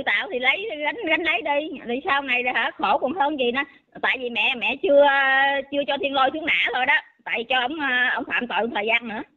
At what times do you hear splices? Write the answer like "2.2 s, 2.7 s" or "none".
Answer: none